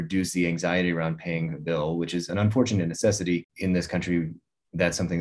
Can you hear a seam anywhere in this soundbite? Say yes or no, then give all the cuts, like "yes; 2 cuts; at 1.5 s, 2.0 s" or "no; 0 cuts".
yes; 2 cuts; at 2.3 s, 3.5 s